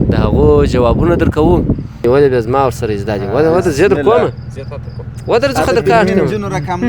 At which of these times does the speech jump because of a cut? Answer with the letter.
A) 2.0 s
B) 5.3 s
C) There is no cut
A